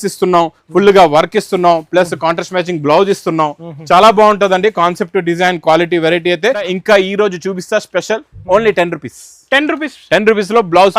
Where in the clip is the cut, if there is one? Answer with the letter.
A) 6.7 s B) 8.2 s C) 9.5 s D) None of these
A